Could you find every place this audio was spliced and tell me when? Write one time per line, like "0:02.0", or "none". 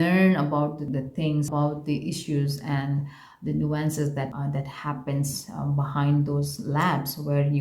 0:01.4
0:04.3